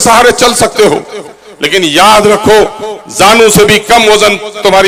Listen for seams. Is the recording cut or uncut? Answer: uncut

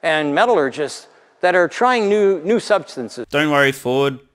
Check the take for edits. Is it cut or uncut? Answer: uncut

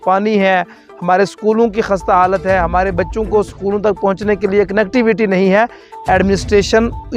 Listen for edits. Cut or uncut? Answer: uncut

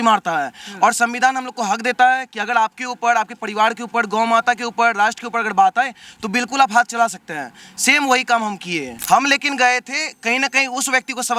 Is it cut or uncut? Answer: cut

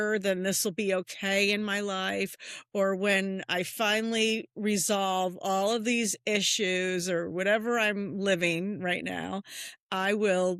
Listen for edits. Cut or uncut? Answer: uncut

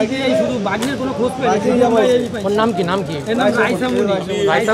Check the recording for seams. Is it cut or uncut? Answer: uncut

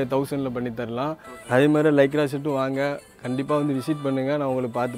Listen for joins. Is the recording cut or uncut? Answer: uncut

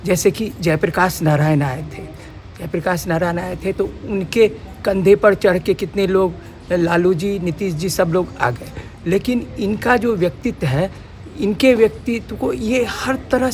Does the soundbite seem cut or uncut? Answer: uncut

